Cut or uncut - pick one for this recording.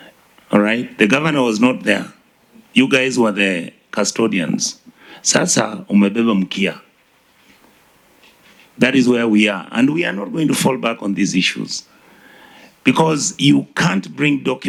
uncut